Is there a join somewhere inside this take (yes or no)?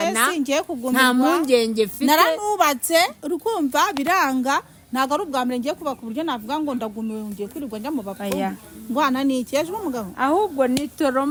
no